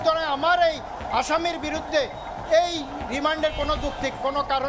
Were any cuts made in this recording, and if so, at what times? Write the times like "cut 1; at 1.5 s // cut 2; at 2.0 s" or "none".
none